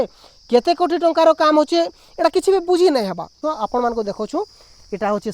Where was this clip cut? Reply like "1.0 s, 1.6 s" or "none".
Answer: 3.4 s